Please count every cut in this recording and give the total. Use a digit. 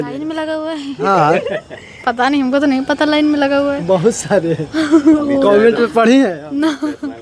0